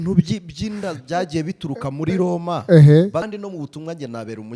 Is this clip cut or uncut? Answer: cut